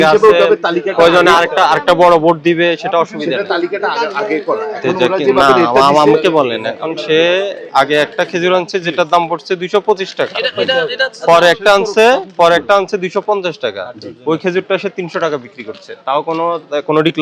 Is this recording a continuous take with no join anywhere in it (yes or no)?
yes